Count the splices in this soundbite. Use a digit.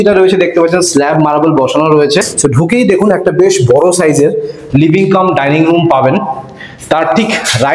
1